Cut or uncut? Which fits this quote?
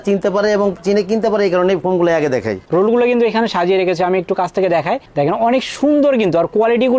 cut